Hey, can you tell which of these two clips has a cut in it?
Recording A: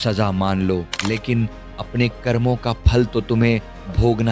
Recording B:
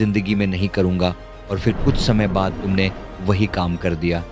A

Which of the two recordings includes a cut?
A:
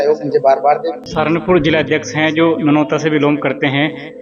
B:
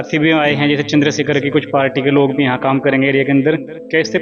A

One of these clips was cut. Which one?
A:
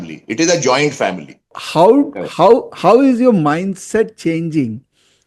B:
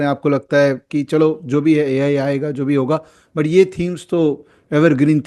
A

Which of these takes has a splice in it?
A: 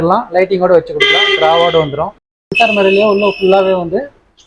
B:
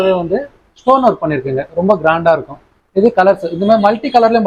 A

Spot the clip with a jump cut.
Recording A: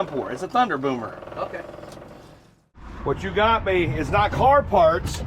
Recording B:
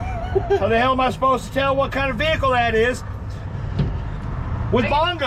A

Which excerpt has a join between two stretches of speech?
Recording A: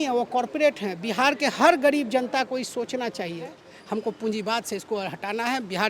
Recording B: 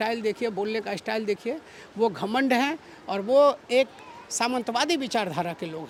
A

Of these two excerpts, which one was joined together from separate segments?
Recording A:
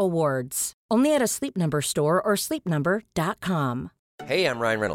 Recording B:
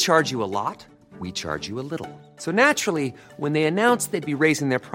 A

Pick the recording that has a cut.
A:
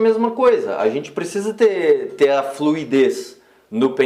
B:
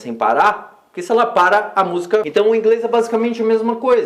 B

